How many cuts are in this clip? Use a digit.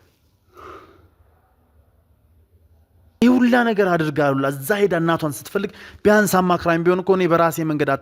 1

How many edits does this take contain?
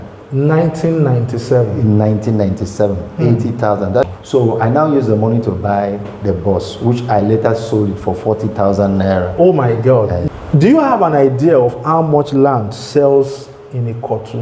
2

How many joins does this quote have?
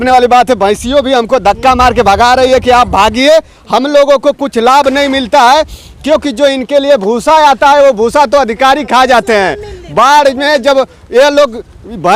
0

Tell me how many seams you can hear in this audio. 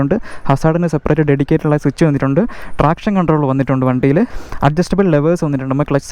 0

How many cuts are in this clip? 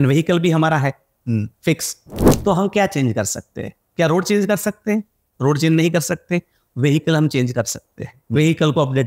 0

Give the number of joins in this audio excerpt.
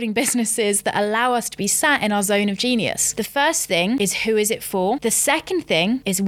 3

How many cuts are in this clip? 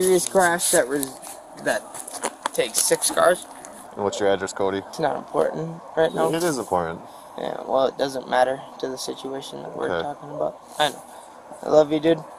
2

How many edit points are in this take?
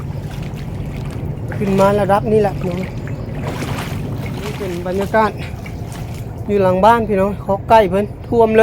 1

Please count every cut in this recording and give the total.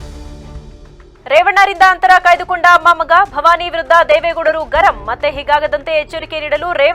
1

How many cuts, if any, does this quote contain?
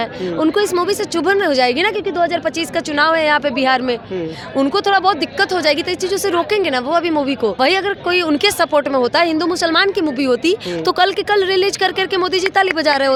0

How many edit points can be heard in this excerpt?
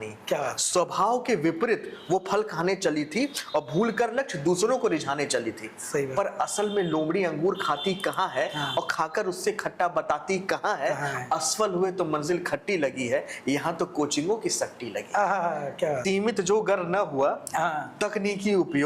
1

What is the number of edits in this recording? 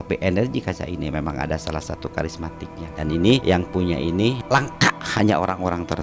3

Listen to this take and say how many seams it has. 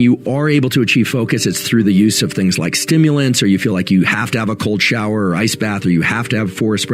0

